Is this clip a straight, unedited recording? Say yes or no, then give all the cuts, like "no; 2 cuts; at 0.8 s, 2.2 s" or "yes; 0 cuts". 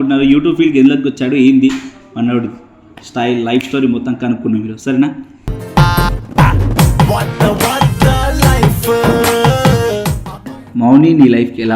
no; 1 cut; at 10.6 s